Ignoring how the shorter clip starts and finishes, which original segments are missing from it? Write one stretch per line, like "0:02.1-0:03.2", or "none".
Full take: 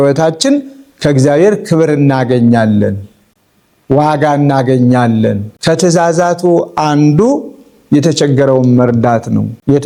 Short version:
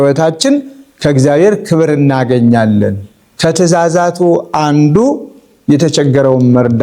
0:03.2-0:05.5

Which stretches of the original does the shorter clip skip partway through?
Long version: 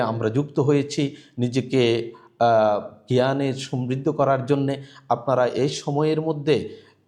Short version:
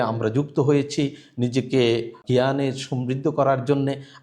0:02.2-0:03.0

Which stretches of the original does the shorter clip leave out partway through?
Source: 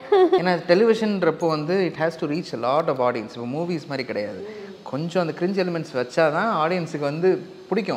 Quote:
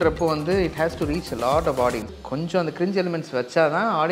0:03.3-0:04.7

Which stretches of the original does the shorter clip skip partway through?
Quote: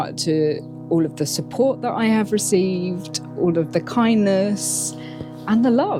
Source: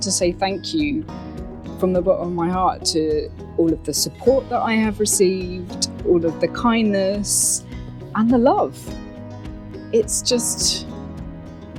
none

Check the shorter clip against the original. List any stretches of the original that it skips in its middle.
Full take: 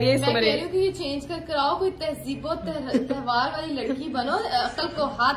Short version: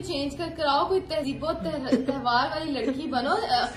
0:02.2-0:02.3

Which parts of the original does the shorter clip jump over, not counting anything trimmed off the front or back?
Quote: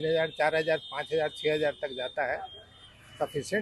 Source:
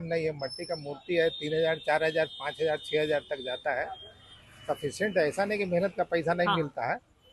none

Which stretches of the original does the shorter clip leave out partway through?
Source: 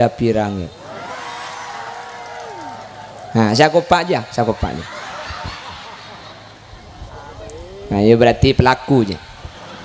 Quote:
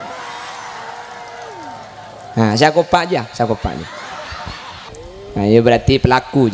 0:06.1-0:07.7

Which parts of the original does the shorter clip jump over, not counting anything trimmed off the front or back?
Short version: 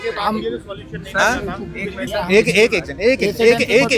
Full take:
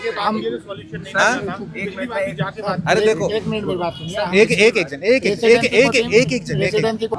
0:02.0-0:04.0

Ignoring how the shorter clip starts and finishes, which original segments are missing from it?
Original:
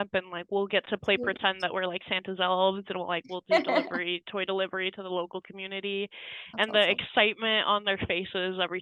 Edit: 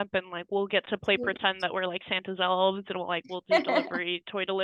none

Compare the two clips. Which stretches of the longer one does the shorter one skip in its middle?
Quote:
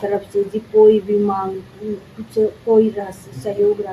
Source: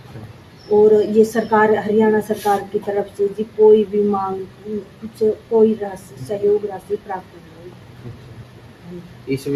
none

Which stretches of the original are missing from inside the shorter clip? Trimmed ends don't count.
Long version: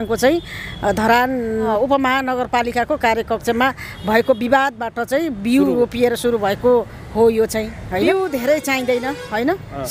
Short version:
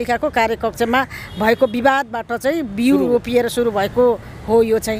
none

